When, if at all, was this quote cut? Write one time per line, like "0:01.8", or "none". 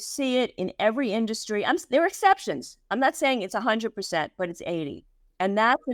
none